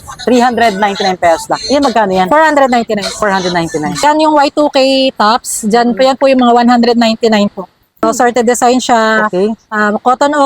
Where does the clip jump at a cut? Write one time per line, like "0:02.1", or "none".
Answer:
0:04.0
0:08.0